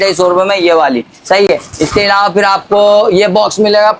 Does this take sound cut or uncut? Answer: uncut